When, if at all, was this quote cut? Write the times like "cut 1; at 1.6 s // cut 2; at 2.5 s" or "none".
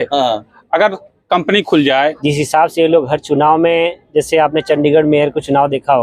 cut 1; at 2.2 s

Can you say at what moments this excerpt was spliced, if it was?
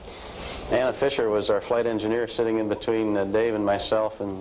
cut 1; at 1.2 s

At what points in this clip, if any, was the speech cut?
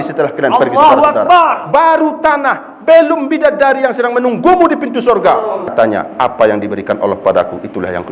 cut 1; at 5.7 s

